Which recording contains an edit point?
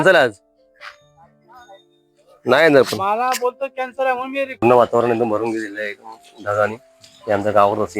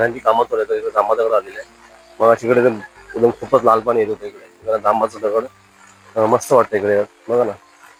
first; 1 cut; at 4.6 s

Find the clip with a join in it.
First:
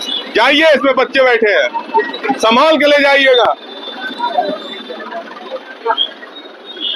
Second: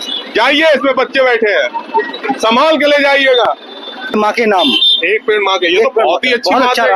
second; 1 cut; at 4.1 s

